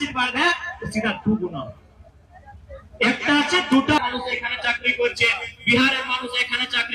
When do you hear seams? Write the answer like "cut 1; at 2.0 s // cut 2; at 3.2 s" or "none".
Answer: cut 1; at 4.0 s